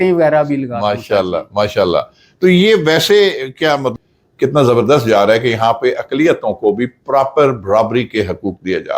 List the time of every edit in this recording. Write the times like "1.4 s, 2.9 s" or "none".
3.9 s